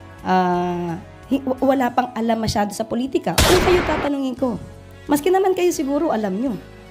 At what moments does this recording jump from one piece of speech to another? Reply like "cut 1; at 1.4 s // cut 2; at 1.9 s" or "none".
cut 1; at 3.4 s